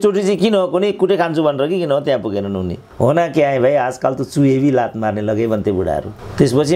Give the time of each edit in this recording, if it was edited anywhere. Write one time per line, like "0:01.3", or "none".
0:02.8